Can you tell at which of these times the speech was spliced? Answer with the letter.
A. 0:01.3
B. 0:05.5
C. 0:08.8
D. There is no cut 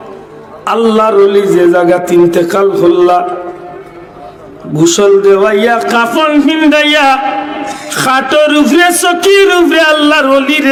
D